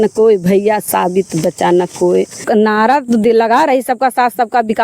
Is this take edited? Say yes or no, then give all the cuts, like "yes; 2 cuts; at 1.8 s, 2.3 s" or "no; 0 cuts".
yes; 1 cut; at 2.4 s